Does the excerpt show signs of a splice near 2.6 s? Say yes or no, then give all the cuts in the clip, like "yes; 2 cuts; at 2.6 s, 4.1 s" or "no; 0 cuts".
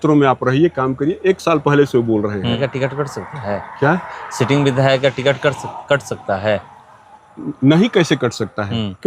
yes; 1 cut; at 2.6 s